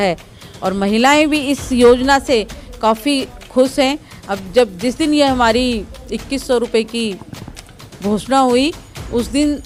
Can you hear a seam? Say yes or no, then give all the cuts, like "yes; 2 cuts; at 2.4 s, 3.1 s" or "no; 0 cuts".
no; 0 cuts